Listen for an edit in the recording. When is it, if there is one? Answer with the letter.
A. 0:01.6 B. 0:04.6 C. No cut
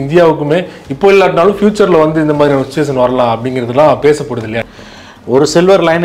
B